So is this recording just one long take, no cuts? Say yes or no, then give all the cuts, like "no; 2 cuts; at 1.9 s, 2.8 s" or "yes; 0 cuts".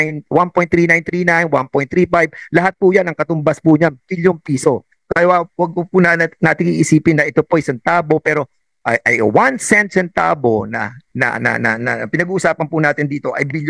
yes; 0 cuts